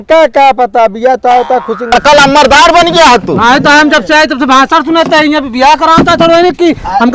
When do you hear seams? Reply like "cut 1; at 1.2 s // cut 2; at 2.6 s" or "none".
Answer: cut 1; at 1.9 s